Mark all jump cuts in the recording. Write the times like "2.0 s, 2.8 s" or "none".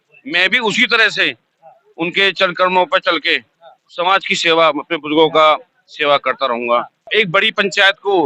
7.1 s